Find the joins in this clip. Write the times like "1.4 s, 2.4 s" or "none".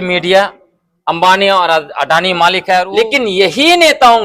2.9 s